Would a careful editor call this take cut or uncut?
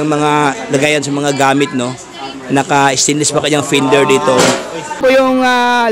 cut